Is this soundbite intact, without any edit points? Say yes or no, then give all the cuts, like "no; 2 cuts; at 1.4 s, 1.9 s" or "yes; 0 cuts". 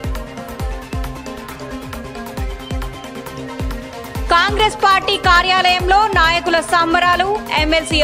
yes; 0 cuts